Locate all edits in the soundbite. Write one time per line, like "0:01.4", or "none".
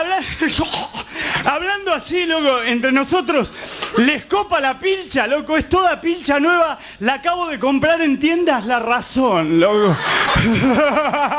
none